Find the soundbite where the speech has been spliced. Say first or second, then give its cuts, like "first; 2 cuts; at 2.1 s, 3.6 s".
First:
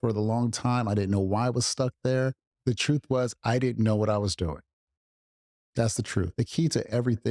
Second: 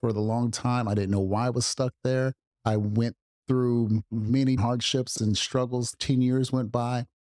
first; 2 cuts; at 2.5 s, 6.3 s